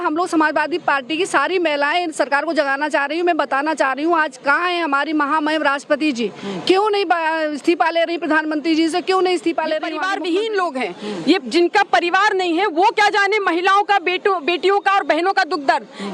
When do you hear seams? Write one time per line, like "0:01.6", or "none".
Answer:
0:10.0